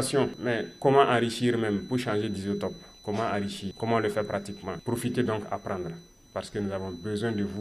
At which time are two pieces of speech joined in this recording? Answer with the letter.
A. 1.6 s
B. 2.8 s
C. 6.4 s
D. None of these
D